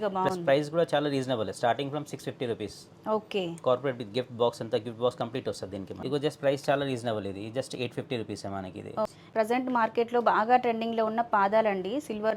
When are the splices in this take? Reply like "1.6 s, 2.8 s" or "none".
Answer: 6.0 s, 9.1 s